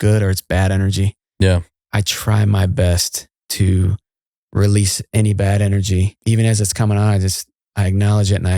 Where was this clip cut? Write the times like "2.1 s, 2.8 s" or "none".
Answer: 6.1 s